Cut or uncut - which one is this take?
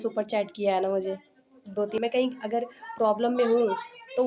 cut